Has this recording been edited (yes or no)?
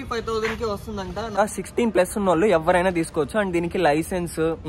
yes